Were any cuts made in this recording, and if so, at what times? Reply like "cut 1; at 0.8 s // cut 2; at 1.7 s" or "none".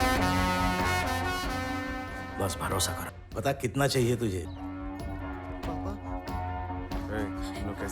cut 1; at 3.2 s // cut 2; at 4.5 s